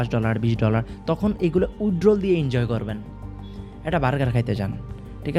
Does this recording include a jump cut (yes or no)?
no